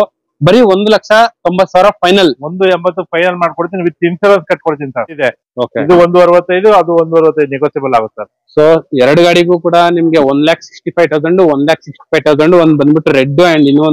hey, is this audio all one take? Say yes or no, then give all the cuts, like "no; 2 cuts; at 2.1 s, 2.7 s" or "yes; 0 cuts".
no; 1 cut; at 5.2 s